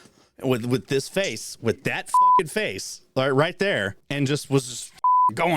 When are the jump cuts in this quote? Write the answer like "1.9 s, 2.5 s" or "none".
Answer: 4.0 s